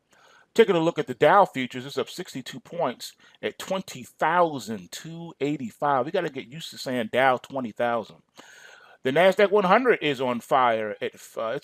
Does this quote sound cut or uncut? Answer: uncut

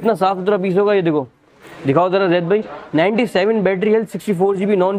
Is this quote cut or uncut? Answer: uncut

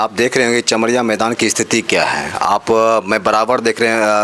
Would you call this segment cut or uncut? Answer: uncut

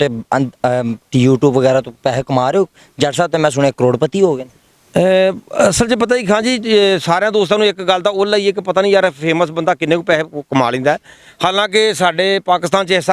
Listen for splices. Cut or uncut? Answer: uncut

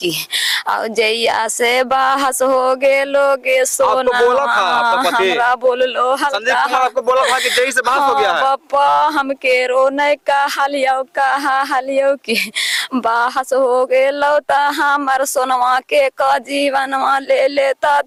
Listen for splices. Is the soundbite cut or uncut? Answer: uncut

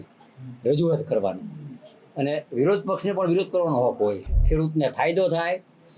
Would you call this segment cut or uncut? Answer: cut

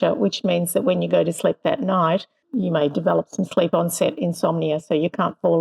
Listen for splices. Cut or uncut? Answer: cut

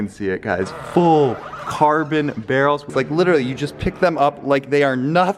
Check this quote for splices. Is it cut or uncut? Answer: uncut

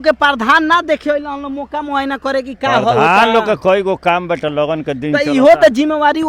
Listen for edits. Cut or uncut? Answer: uncut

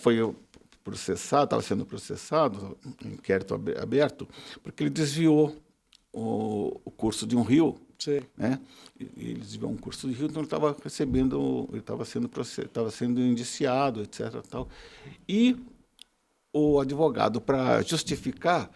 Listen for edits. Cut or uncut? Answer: uncut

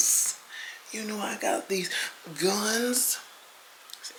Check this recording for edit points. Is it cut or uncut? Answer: uncut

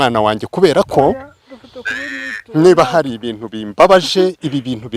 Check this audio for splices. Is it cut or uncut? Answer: uncut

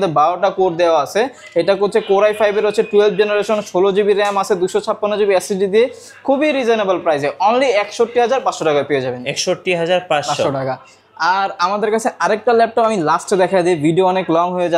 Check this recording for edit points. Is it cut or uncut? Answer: uncut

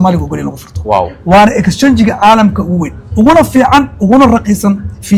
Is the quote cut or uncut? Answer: uncut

